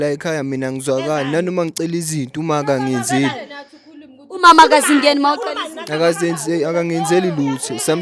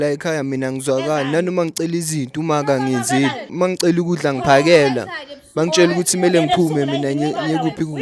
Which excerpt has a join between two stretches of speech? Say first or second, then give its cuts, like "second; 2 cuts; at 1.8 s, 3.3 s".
second; 1 cut; at 3.5 s